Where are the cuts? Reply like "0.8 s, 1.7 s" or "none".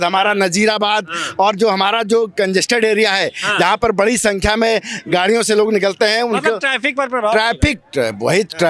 none